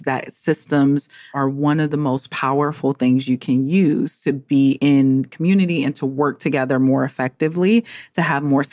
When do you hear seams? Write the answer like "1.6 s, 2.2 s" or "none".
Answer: 1.3 s, 4.8 s